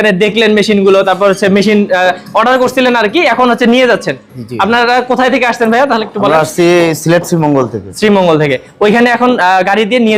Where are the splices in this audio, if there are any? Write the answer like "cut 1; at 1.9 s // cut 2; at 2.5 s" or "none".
none